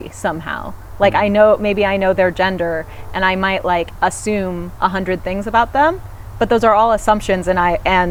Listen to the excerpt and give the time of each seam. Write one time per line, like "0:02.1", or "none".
none